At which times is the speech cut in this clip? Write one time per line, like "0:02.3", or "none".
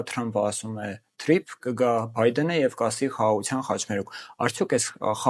none